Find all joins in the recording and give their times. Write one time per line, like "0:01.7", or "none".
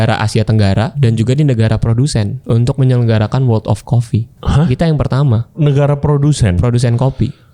0:00.9
0:02.4
0:04.3
0:05.5